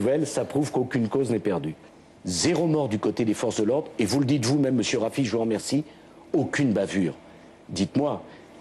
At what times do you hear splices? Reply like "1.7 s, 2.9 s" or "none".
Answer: 1.8 s